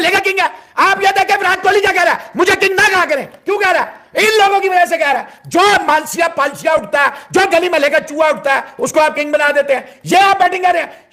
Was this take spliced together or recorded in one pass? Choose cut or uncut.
uncut